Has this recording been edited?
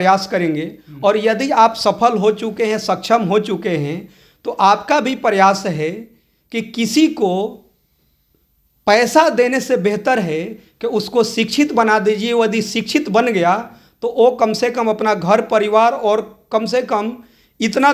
no; 0 cuts

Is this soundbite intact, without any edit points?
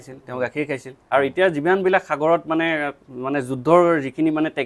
no; 1 cut; at 0.9 s

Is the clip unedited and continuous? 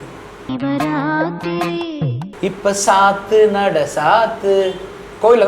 no; 1 cut; at 2.5 s

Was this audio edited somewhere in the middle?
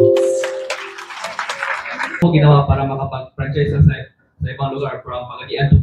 yes; 1 cut; at 2.2 s

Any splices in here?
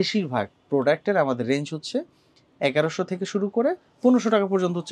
no; 0 cuts

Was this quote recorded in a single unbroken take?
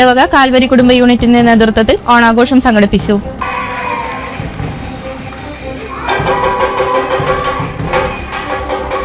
yes; 0 cuts

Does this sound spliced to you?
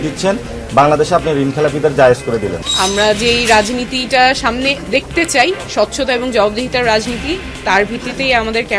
yes; 1 cut; at 2.6 s

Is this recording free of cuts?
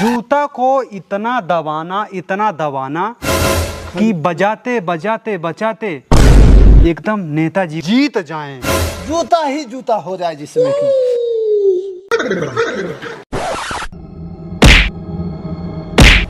yes; 0 cuts

